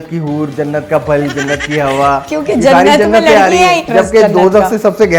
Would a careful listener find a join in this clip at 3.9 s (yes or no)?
yes